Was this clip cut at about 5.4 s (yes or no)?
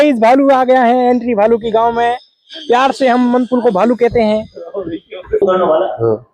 yes